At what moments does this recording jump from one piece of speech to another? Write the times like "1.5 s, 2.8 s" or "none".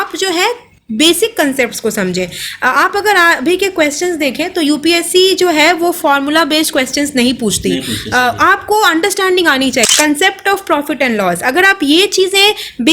9.9 s